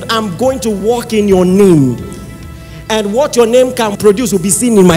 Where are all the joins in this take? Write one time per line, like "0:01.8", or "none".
0:03.9